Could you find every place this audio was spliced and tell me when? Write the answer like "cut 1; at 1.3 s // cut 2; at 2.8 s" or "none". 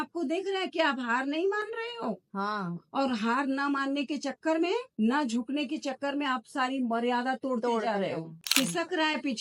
cut 1; at 4.9 s // cut 2; at 8.4 s

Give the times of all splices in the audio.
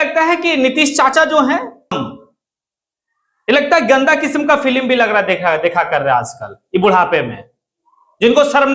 cut 1; at 2.0 s

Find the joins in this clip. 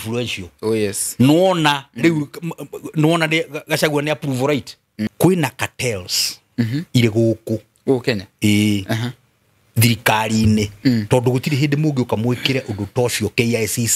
cut 1; at 5.1 s

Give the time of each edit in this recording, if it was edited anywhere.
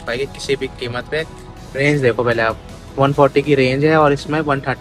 none

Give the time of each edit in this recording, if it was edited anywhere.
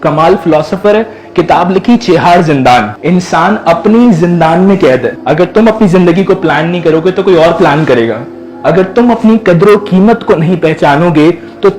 cut 1; at 2.9 s // cut 2; at 5.1 s

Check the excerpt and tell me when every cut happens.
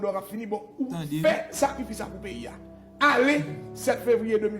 cut 1; at 2.9 s

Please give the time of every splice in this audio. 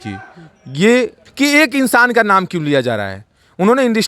cut 1; at 1.2 s

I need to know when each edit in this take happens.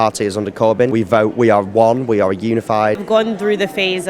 cut 1; at 0.9 s // cut 2; at 3.0 s

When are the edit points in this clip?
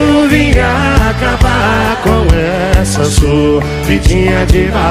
none

